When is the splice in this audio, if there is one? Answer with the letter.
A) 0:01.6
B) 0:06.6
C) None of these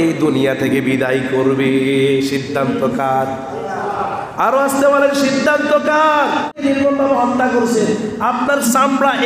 B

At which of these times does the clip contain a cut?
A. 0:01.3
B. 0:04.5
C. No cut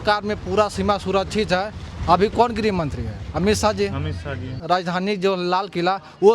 B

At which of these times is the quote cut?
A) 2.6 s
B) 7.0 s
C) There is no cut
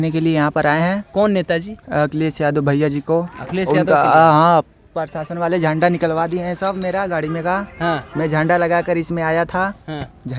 C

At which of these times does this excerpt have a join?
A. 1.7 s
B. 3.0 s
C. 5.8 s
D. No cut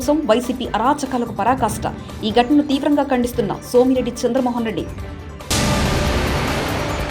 D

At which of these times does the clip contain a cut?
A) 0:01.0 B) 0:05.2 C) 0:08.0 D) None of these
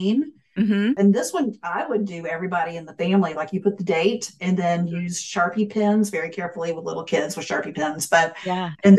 A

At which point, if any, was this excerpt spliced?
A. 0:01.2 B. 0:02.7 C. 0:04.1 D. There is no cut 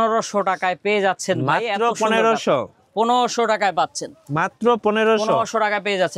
D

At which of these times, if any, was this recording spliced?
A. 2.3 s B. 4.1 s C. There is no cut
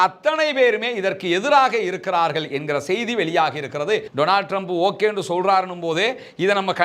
B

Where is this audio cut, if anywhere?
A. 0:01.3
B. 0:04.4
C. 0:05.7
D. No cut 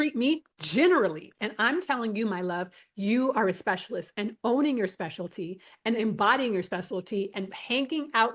A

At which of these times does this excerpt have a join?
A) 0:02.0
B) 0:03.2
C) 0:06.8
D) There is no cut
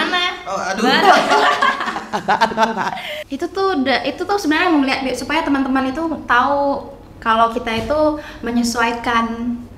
B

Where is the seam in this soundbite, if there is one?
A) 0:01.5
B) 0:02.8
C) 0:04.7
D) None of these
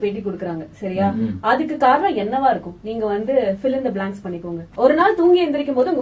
C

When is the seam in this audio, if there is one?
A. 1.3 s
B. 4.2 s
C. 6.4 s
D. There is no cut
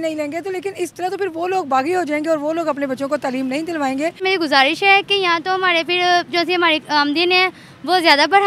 B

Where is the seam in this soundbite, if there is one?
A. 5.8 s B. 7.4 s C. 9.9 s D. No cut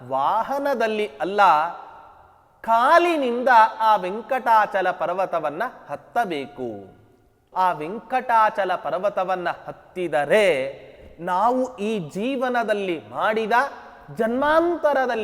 B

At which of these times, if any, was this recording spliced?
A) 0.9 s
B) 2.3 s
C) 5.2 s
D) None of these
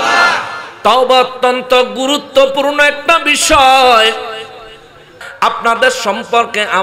C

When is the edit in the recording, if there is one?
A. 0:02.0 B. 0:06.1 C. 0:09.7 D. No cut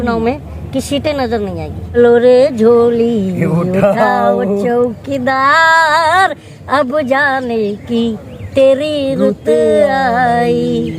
A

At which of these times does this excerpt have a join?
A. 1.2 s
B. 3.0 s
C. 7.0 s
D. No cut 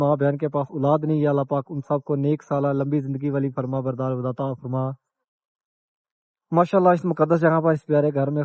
D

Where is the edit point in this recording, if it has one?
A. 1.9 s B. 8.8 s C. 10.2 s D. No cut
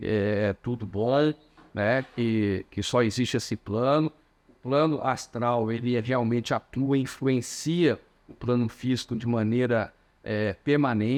D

